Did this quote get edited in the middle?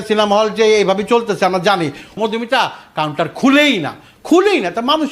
yes; 1 cut; at 2.1 s

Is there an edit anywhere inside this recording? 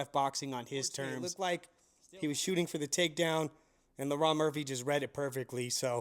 yes; 1 cut; at 1.3 s

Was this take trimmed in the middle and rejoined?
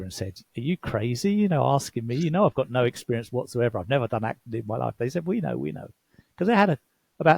no; 0 cuts

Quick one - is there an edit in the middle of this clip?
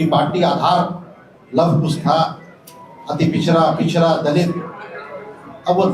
no; 0 cuts

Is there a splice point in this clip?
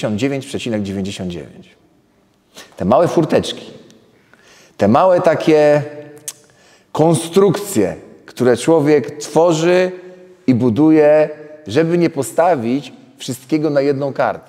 no; 0 cuts

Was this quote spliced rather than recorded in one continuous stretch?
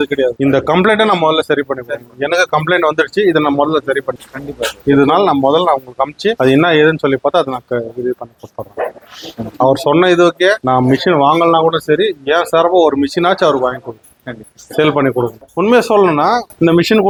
no; 0 cuts

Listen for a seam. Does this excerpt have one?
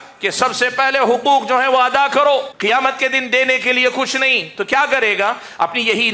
yes; 1 cut; at 2.5 s

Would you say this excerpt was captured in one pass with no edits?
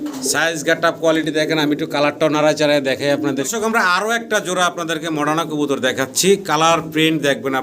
no; 1 cut; at 3.4 s

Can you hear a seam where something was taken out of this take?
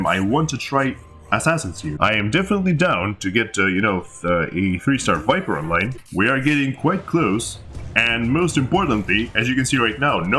yes; 2 cuts; at 1.9 s, 6.0 s

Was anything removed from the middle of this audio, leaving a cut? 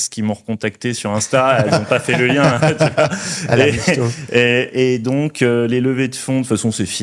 no; 0 cuts

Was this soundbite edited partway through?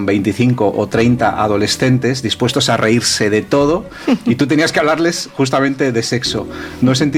no; 0 cuts

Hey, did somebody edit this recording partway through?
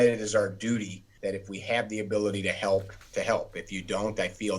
yes; 2 cuts; at 1.0 s, 3.0 s

